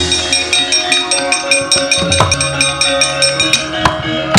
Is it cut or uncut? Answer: cut